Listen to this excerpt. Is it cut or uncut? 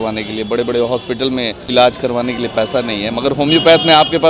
cut